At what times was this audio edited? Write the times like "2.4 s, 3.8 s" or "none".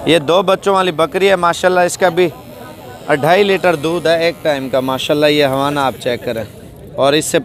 none